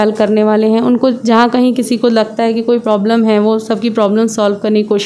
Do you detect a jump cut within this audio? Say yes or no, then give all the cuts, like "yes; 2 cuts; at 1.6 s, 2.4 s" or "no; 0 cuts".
no; 0 cuts